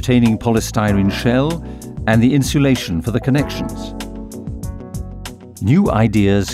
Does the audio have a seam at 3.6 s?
yes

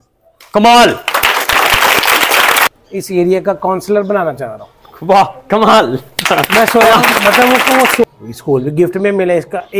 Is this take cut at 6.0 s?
no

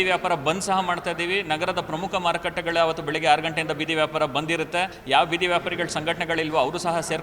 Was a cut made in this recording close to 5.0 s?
yes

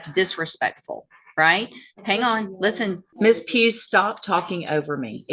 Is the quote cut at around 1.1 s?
no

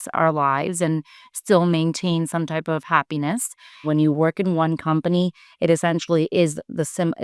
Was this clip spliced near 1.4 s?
no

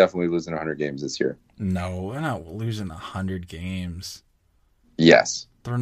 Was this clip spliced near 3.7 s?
no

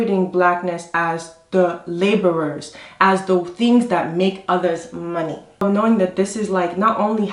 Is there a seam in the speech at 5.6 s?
yes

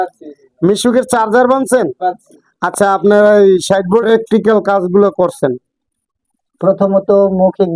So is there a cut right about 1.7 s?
no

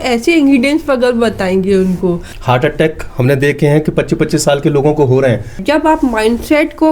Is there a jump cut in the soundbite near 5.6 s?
yes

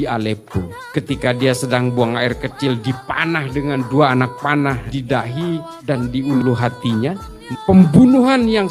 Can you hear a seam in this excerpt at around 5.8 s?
no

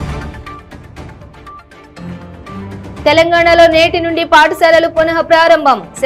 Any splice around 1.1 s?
no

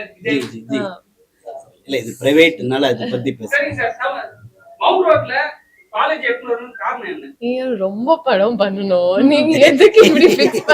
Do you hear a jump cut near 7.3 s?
yes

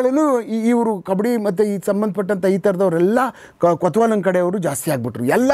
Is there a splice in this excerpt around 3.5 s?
no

